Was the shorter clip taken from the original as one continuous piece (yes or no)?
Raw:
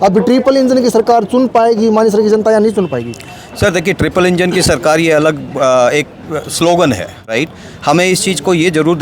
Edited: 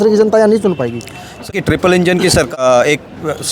no